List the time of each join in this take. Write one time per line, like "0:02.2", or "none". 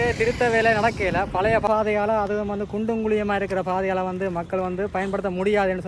0:01.7